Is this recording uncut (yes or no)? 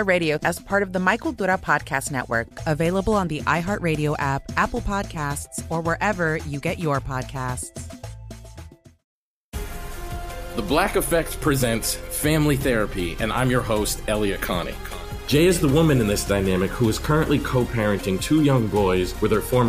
no